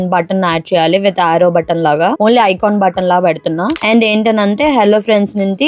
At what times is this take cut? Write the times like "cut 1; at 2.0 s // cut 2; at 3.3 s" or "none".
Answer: cut 1; at 3.8 s